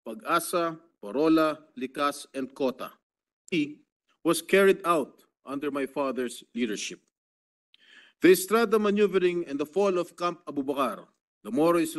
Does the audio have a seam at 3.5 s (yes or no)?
yes